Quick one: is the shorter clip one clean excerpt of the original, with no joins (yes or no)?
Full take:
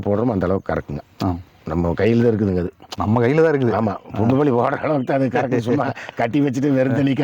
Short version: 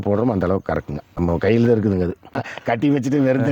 no